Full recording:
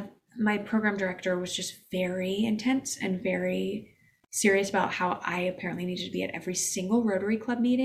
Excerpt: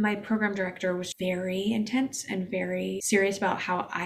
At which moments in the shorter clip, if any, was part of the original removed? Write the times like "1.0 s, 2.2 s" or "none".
1.1 s, 3.0 s

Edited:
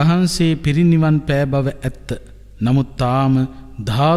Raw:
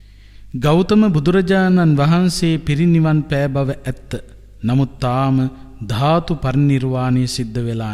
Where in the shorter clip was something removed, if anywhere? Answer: none

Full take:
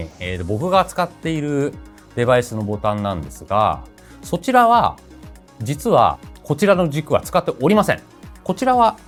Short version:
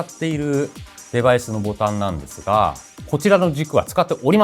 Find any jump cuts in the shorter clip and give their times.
2.9 s

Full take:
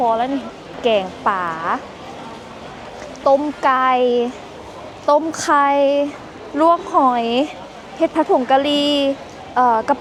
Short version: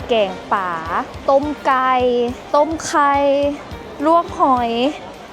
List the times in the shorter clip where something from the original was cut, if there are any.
1.1 s, 2.4 s

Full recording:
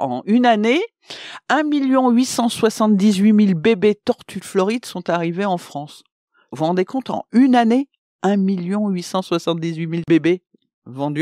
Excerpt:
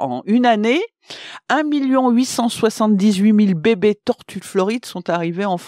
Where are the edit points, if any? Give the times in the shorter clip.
none

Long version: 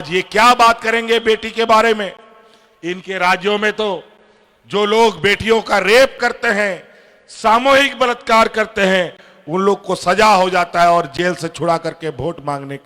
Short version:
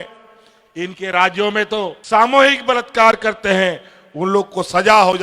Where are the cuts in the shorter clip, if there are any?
2.0 s

